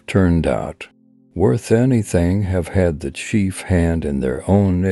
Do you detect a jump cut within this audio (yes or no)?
no